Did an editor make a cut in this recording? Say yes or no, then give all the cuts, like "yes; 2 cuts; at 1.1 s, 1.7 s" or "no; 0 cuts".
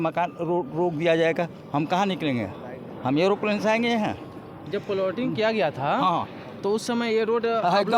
no; 0 cuts